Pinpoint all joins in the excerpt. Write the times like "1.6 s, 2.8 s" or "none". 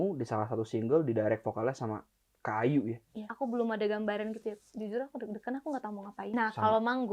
3.2 s, 6.3 s